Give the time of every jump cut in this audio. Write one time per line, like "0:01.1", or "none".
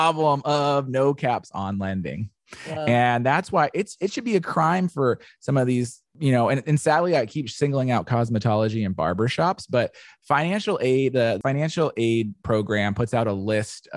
0:06.0
0:11.4